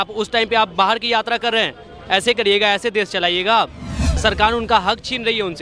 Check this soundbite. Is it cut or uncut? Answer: cut